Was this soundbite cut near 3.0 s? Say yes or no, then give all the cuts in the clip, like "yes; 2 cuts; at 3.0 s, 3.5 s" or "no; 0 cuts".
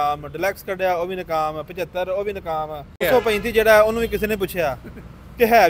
yes; 1 cut; at 3.0 s